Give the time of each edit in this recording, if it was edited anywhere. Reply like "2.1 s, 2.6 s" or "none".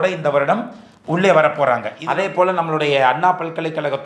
2.0 s